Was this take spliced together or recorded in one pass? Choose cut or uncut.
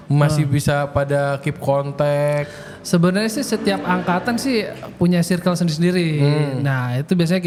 uncut